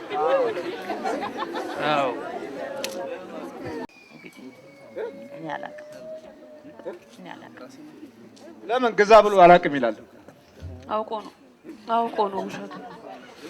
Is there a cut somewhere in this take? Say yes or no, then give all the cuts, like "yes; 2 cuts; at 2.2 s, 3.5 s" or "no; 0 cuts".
no; 0 cuts